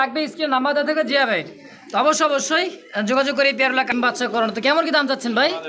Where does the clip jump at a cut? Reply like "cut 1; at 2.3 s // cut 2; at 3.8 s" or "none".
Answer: cut 1; at 3.9 s

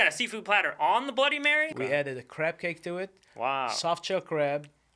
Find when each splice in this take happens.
cut 1; at 1.7 s

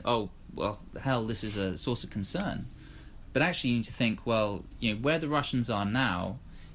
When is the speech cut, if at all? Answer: none

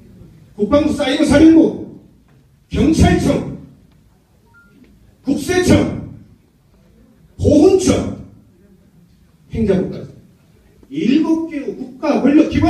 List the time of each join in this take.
cut 1; at 4.0 s

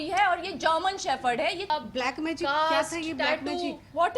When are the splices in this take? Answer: cut 1; at 1.7 s

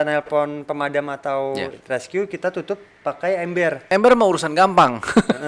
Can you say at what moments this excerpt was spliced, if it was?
cut 1; at 3.9 s

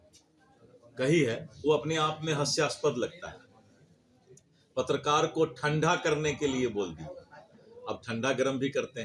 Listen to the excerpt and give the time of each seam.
none

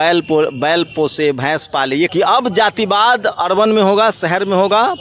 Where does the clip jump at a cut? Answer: cut 1; at 2.1 s

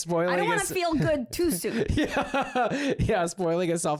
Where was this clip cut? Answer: none

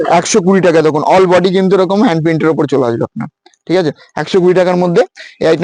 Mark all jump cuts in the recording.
none

